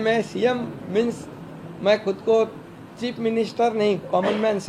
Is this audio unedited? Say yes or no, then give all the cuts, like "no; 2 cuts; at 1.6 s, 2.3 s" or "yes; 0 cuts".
yes; 0 cuts